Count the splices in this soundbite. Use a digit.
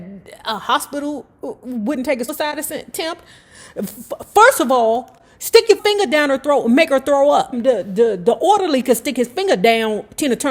3